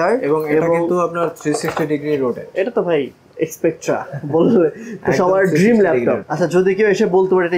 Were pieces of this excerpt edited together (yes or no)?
yes